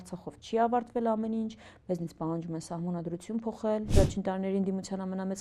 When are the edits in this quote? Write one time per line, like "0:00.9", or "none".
0:03.9